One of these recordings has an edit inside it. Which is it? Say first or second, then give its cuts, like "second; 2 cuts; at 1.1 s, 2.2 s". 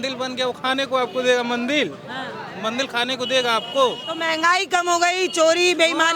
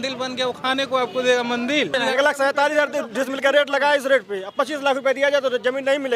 second; 1 cut; at 2.1 s